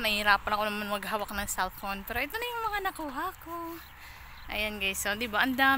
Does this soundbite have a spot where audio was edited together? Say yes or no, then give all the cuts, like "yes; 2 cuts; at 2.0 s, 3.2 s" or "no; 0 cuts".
no; 0 cuts